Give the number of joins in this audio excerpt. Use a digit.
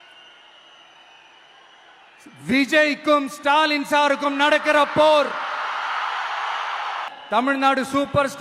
1